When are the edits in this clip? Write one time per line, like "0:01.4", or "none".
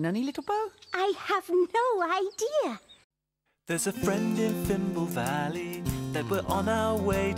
none